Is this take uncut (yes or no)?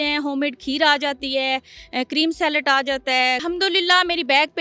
no